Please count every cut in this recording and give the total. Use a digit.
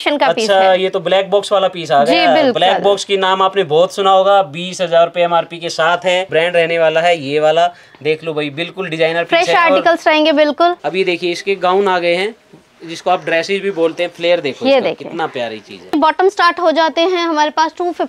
3